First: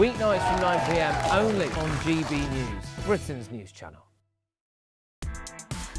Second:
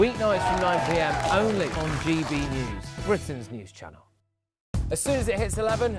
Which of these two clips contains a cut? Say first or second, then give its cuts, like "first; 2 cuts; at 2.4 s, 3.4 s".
first; 1 cut; at 4.7 s